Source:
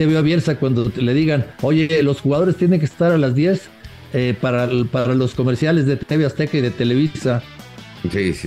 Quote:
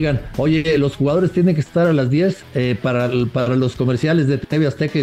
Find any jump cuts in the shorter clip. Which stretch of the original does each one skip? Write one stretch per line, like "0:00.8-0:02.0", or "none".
0:03.7-0:04.0